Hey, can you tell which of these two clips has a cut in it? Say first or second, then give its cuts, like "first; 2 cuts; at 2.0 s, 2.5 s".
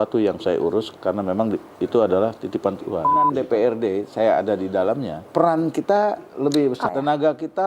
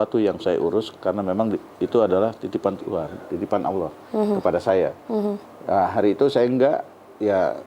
first; 3 cuts; at 3.3 s, 5.2 s, 6.8 s